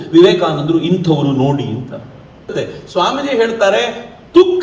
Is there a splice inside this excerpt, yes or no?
yes